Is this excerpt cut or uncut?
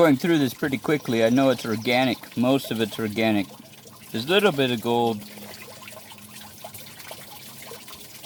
uncut